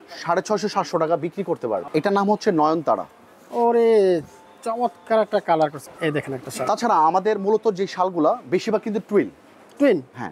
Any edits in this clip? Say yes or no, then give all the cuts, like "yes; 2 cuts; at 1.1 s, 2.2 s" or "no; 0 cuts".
yes; 2 cuts; at 1.9 s, 5.8 s